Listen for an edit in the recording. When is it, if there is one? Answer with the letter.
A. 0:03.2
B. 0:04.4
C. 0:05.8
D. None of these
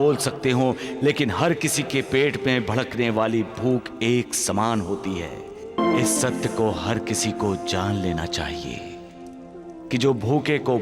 C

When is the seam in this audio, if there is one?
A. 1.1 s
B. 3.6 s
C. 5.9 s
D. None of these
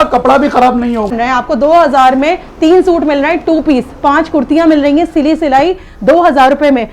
A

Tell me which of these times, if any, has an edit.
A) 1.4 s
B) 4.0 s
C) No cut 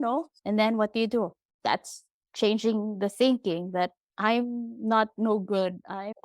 A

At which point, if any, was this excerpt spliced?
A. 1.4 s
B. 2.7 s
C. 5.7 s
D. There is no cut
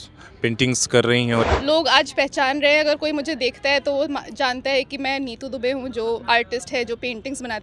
A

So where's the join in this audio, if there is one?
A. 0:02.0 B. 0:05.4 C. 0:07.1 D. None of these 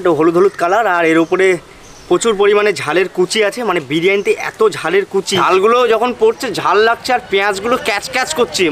B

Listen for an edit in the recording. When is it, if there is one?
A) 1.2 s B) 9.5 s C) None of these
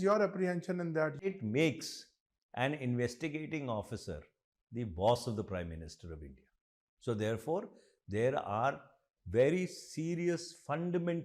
A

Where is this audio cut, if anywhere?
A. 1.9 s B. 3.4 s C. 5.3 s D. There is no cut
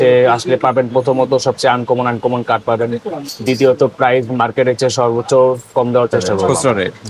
D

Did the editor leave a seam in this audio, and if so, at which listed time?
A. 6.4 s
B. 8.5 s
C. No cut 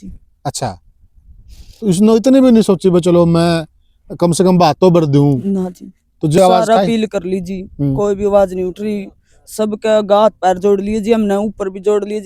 A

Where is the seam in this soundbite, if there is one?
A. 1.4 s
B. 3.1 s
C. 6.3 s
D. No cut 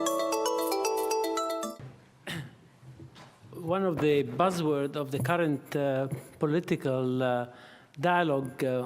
A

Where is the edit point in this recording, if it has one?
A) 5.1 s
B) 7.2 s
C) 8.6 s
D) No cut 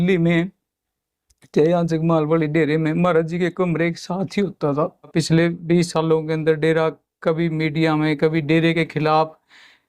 A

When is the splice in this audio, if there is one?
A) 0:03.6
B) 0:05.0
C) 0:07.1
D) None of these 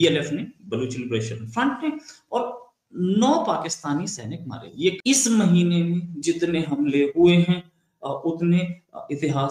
B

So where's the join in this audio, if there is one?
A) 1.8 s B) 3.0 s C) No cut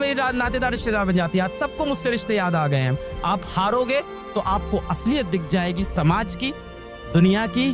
B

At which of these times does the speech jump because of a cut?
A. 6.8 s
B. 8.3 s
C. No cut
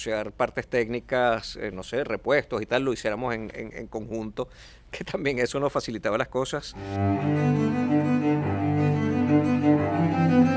A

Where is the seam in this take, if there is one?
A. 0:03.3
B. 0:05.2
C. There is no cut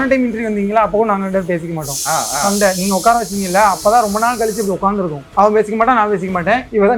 B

